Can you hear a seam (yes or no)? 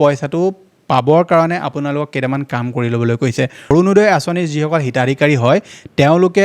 yes